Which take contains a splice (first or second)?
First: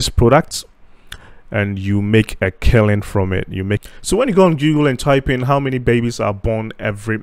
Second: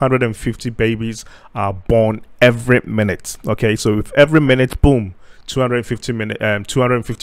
first